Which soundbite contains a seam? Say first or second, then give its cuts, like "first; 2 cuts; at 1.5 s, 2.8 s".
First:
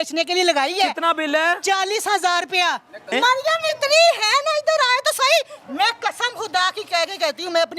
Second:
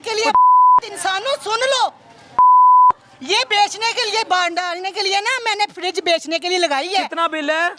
first; 1 cut; at 3.1 s